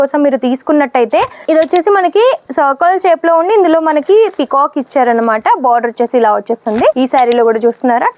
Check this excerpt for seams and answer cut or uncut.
cut